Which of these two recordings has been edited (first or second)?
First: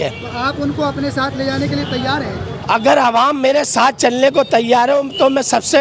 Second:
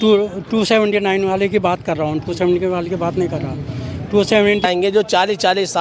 second